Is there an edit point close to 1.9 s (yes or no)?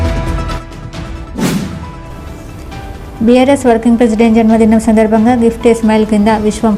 yes